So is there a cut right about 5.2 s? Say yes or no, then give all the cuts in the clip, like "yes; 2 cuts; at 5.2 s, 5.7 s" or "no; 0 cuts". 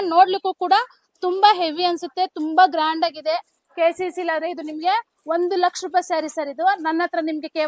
no; 0 cuts